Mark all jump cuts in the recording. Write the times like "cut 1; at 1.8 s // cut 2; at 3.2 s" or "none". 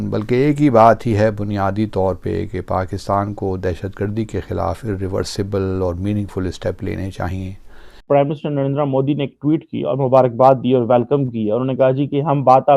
cut 1; at 8.0 s